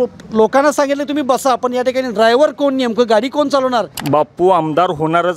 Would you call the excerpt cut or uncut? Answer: cut